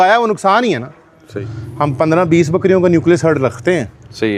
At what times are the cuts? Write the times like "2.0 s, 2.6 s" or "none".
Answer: 1.4 s